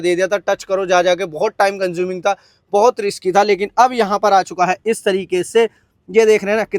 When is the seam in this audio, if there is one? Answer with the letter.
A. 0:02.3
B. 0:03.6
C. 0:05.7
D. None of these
D